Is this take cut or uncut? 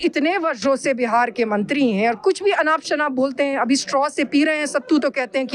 uncut